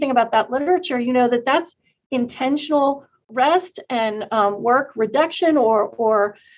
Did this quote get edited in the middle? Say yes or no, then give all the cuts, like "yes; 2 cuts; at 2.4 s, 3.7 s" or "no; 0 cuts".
no; 0 cuts